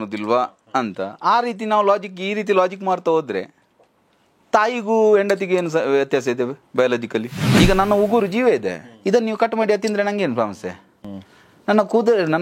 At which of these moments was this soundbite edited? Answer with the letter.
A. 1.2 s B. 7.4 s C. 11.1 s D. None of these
B